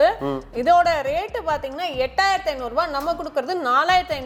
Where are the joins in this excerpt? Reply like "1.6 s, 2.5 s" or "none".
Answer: none